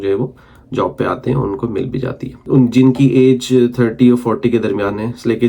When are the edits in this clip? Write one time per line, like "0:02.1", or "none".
0:02.4